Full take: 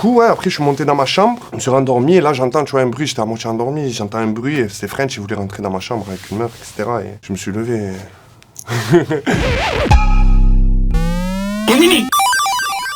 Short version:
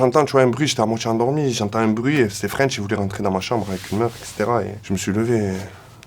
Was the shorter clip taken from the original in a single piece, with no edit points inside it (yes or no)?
yes